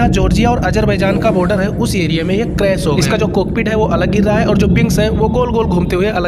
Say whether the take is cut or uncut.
uncut